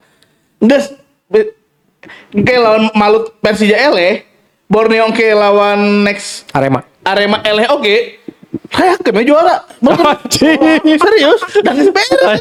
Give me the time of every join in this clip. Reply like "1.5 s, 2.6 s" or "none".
none